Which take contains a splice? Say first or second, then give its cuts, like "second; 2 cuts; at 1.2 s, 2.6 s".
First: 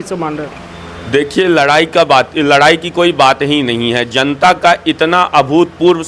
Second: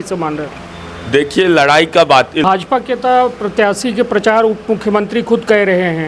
second; 1 cut; at 2.4 s